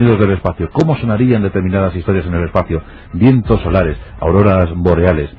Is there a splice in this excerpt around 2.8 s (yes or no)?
no